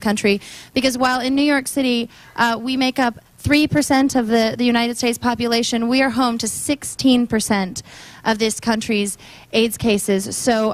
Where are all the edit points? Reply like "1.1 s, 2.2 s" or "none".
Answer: none